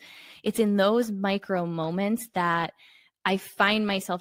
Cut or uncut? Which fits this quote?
uncut